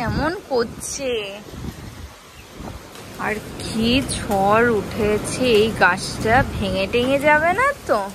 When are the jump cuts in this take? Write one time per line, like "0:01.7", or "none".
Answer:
0:03.0